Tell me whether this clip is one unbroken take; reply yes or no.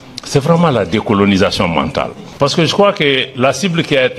no